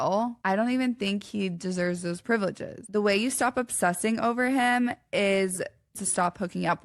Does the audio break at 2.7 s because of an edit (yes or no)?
yes